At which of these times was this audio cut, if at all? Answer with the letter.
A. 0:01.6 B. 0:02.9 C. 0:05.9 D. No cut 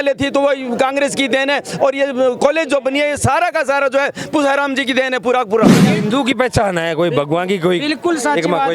C